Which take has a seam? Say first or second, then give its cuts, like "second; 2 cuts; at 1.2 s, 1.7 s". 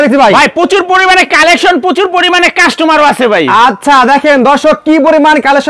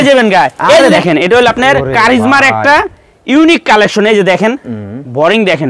second; 1 cut; at 1.0 s